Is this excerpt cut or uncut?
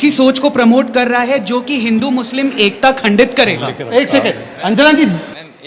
uncut